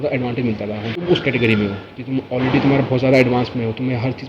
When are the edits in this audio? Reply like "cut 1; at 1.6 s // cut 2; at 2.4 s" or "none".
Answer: cut 1; at 1.0 s